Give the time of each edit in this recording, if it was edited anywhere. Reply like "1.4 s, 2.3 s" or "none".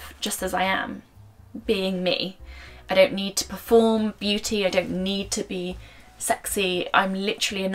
none